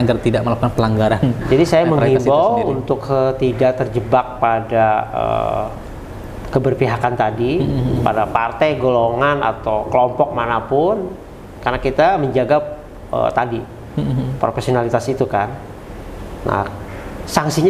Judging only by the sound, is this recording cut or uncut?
uncut